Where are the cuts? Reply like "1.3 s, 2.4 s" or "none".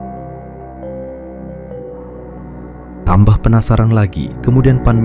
none